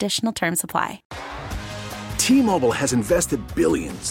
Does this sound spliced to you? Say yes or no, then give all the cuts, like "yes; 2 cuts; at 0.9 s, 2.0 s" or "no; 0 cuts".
yes; 1 cut; at 1.1 s